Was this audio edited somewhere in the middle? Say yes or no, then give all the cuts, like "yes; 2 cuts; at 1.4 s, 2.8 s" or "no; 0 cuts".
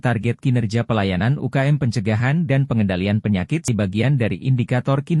yes; 1 cut; at 3.7 s